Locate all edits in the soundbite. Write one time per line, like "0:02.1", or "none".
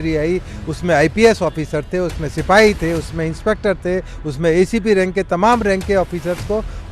none